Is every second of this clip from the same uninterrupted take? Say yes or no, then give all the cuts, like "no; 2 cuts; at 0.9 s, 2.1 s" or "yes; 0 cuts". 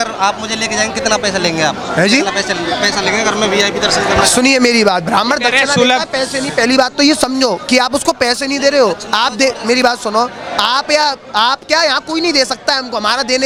yes; 0 cuts